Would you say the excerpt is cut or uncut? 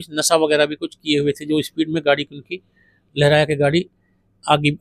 uncut